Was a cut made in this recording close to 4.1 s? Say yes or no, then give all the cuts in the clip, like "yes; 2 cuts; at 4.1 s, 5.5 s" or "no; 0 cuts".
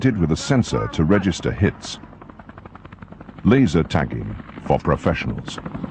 yes; 1 cut; at 4.1 s